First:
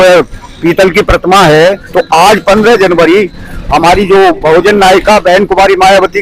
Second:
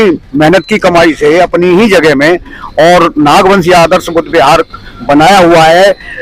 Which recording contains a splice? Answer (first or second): first